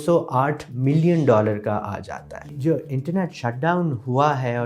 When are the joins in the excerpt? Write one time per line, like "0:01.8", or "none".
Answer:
0:02.5